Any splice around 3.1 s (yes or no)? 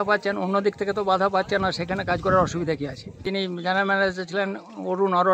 yes